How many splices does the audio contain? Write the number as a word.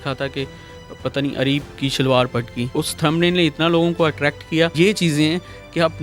two